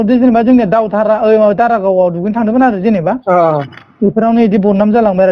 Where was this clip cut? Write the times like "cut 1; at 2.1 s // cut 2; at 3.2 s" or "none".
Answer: none